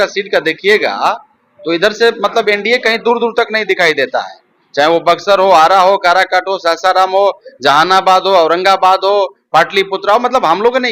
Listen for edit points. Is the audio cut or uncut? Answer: uncut